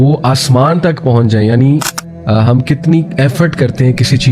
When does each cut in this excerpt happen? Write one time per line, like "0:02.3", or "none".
0:02.0